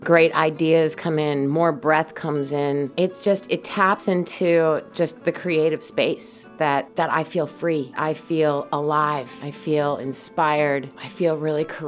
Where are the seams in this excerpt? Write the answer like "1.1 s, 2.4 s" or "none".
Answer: 2.9 s, 6.9 s, 8.0 s, 9.4 s, 11.0 s